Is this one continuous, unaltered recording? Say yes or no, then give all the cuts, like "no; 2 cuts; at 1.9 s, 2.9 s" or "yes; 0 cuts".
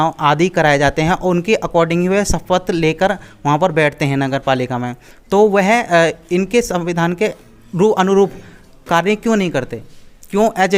yes; 0 cuts